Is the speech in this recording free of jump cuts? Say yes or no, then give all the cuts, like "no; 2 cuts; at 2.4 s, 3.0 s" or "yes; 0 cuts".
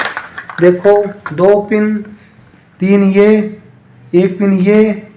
yes; 0 cuts